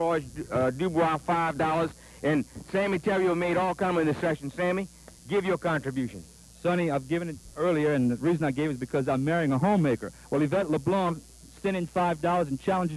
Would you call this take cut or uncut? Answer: uncut